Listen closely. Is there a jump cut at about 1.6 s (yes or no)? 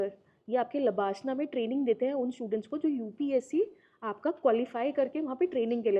no